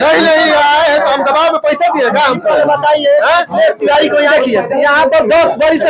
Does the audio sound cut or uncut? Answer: cut